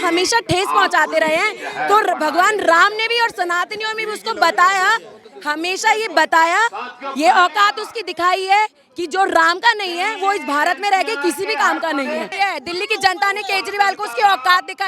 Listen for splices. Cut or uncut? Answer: cut